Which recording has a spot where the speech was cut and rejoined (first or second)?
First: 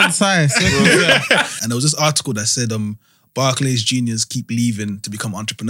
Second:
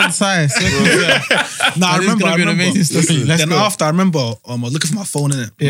first